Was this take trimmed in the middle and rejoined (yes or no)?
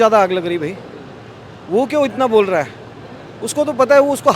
no